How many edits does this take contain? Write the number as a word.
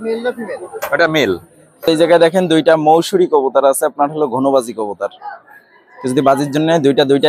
one